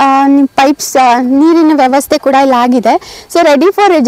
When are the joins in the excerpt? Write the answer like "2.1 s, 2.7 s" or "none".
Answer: none